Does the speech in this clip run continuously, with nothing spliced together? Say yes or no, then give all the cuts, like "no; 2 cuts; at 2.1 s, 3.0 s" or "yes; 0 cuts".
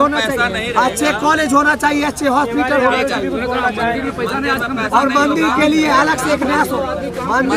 yes; 0 cuts